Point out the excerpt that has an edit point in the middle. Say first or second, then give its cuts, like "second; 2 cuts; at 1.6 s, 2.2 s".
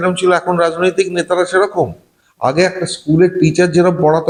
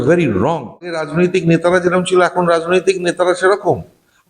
second; 1 cut; at 1.0 s